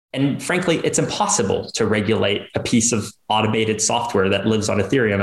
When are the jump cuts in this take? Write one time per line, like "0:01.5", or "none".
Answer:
none